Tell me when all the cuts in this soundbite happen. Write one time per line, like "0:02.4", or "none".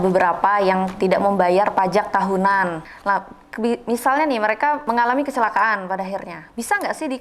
0:02.9
0:04.8